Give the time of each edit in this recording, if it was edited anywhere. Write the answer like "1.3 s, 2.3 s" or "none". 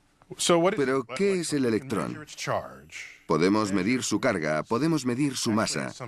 3.2 s

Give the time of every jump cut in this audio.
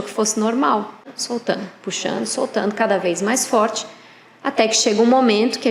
1.2 s

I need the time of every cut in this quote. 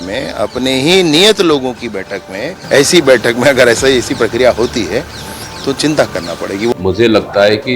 2.6 s, 6.7 s

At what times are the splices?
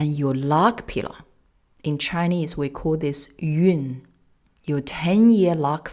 none

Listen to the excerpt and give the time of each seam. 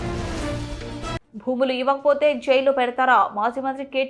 1.3 s

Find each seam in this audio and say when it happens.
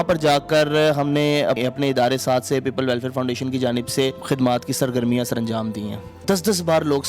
1.6 s, 4.2 s, 6.2 s

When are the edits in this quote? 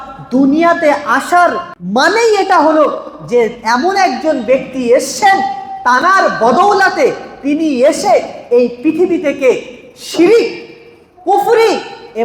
1.7 s

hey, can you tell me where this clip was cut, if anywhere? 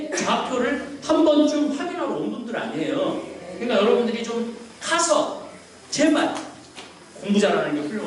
none

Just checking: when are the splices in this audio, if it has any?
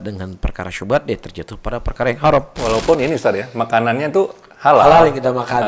2.5 s

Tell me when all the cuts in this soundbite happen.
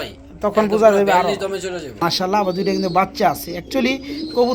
1.9 s

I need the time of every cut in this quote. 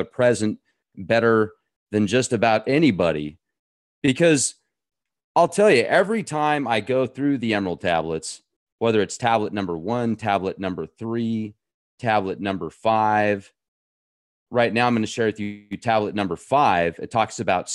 12.2 s

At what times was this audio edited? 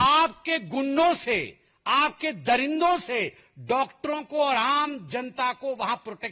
none

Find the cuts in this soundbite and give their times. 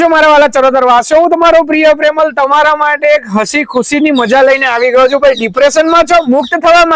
none

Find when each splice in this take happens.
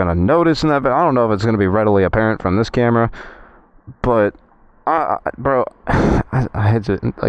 none

